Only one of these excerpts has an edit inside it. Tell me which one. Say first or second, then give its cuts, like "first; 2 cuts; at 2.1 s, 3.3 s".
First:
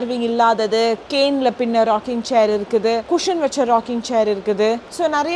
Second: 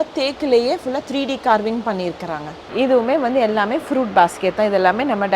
second; 1 cut; at 2.6 s